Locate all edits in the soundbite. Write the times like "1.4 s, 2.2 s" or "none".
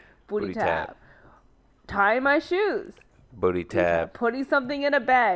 none